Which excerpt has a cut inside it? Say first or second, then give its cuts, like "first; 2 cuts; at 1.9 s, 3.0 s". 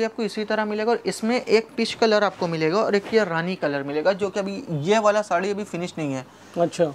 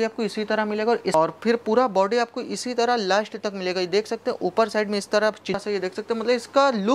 second; 2 cuts; at 1.1 s, 5.6 s